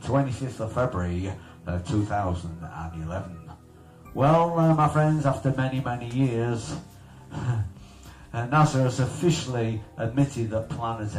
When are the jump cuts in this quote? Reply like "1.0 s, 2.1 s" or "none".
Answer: none